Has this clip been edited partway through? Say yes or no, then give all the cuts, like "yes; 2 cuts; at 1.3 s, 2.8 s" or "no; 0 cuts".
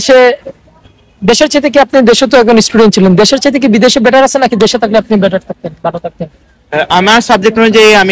no; 0 cuts